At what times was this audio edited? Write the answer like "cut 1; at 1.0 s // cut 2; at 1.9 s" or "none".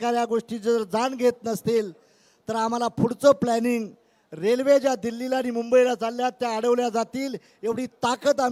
none